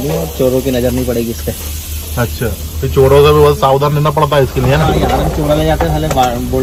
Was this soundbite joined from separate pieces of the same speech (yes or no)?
no